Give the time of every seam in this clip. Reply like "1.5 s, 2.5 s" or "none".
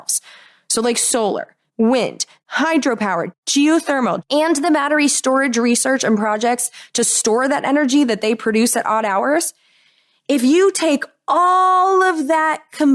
1.6 s, 2.3 s, 3.3 s, 4.2 s